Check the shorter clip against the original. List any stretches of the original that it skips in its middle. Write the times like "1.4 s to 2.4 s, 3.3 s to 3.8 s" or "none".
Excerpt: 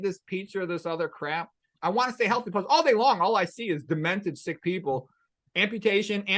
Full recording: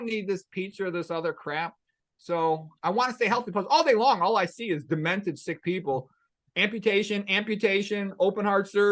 1.9 s to 2.7 s